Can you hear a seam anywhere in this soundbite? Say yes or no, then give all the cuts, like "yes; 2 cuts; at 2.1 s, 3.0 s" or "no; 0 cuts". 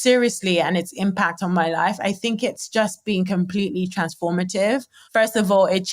yes; 1 cut; at 5.0 s